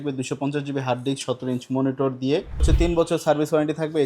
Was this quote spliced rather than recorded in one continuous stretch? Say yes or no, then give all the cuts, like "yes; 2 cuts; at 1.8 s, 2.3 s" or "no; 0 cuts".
yes; 1 cut; at 2.7 s